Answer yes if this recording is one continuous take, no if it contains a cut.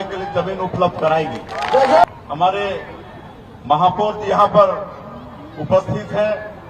no